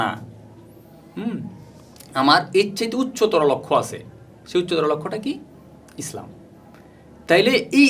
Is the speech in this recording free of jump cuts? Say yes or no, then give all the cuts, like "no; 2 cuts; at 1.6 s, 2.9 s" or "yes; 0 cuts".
yes; 0 cuts